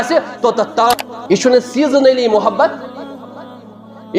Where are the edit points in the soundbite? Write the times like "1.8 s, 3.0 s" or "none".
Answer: 1.1 s